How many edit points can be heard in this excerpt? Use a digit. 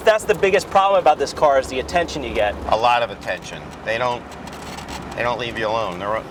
0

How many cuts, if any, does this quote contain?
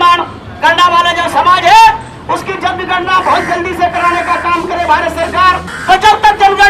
1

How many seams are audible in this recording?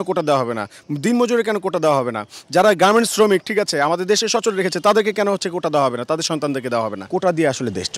1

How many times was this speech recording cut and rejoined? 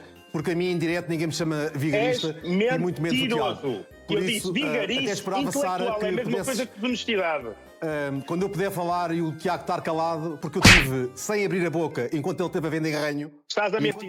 0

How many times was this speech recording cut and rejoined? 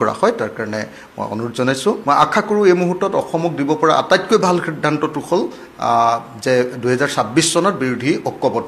1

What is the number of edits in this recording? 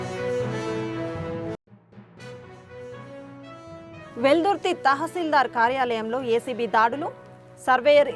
1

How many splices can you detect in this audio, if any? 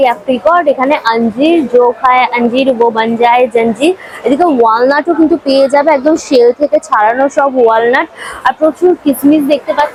0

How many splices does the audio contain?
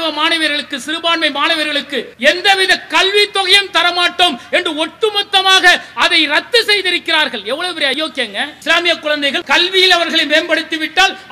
3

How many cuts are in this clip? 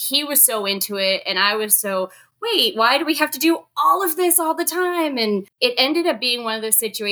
1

